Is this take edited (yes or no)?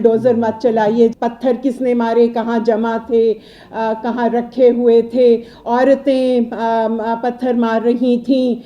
yes